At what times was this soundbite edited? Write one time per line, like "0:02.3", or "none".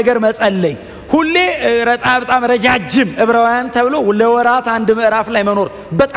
none